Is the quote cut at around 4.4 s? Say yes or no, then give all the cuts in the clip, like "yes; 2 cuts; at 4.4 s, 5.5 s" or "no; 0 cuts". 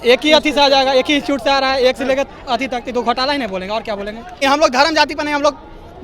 yes; 1 cut; at 4.4 s